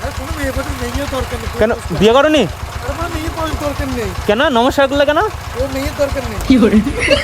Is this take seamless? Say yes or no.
no